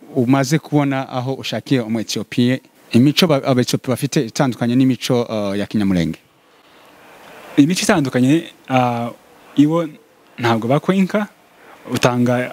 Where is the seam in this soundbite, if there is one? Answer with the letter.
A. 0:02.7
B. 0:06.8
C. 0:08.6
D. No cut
A